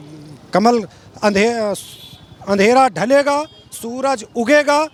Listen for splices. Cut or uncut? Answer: uncut